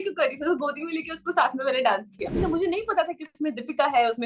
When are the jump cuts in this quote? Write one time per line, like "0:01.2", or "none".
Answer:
0:02.4